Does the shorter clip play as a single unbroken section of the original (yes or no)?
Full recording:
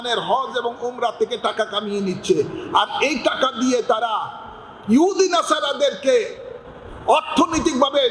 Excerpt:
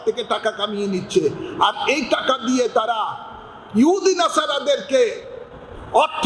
yes